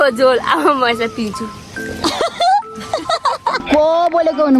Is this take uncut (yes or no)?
no